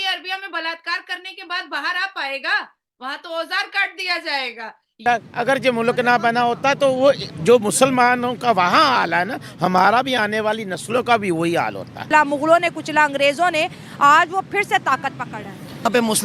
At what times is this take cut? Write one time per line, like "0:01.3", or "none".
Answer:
0:05.0
0:12.0